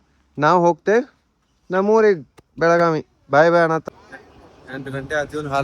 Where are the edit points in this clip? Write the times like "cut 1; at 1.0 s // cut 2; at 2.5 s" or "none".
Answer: cut 1; at 3.8 s